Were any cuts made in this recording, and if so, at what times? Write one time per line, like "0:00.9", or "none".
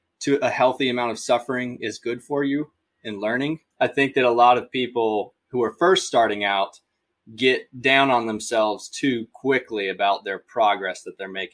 0:03.6

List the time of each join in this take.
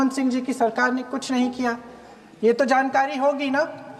none

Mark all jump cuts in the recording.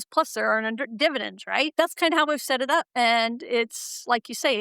0:01.8
0:02.9

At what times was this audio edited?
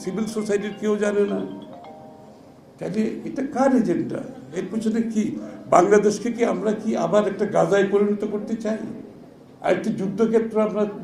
none

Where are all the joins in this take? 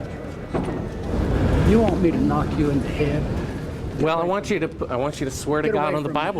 0:01.1

